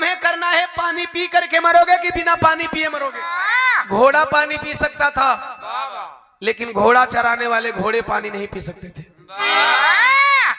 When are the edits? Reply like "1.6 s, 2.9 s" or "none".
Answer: 3.3 s